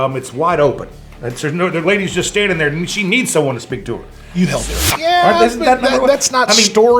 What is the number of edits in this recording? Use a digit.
1